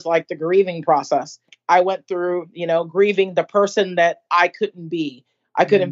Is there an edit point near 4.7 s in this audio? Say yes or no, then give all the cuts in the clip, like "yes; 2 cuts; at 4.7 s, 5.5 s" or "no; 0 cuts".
no; 1 cut; at 1.6 s